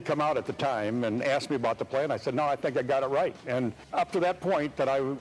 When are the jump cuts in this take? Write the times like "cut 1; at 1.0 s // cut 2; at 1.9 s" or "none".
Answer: cut 1; at 3.8 s